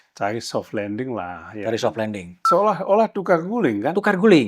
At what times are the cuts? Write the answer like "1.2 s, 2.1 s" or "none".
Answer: 2.5 s